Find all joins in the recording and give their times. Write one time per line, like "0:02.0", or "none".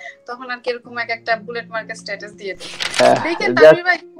0:03.0